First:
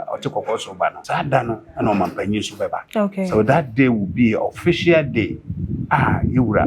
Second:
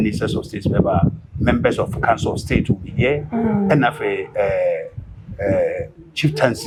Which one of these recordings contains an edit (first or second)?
first